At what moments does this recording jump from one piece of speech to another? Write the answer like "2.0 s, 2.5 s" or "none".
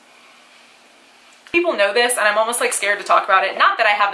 1.5 s